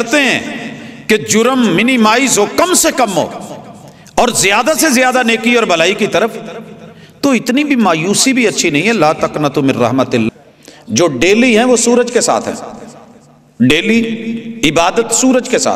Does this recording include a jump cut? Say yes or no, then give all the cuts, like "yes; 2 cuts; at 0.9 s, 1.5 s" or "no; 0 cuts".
yes; 1 cut; at 10.3 s